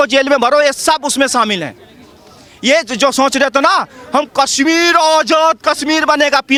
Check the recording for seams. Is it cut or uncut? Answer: uncut